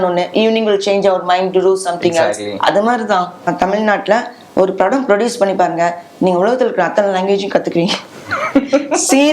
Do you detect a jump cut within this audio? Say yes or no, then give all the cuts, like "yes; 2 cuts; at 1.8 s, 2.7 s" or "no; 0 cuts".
yes; 1 cut; at 3.5 s